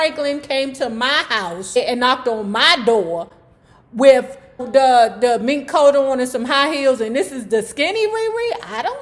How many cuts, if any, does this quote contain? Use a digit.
2